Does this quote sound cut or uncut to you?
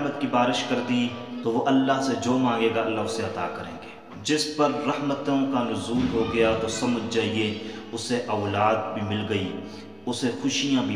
uncut